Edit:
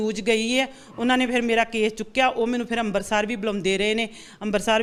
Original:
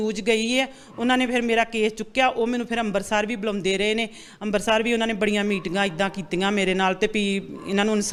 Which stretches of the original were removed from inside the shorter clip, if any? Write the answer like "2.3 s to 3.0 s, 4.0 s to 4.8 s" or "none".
none